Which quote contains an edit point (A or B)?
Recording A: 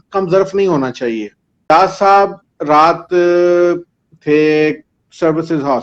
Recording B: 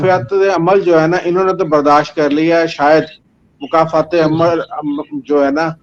A